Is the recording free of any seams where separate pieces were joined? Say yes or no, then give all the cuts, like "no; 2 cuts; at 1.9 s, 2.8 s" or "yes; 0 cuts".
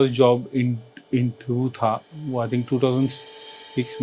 yes; 0 cuts